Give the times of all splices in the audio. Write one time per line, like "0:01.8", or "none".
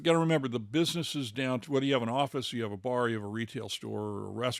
none